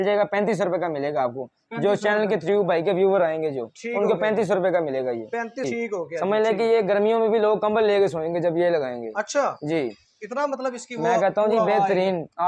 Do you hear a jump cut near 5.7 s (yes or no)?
yes